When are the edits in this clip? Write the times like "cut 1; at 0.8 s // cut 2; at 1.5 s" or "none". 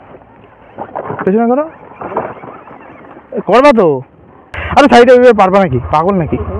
cut 1; at 4.6 s